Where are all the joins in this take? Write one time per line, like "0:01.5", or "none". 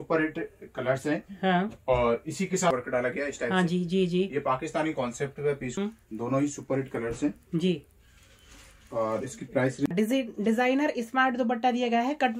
0:02.7
0:05.8
0:09.9

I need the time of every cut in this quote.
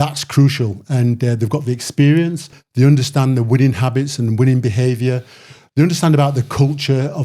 0:02.6

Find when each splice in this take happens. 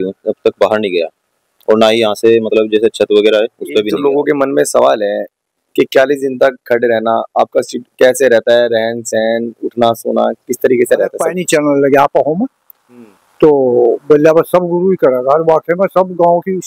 0:03.9
0:11.3

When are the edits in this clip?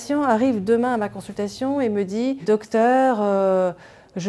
0:02.4

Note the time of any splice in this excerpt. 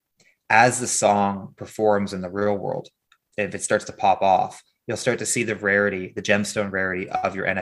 none

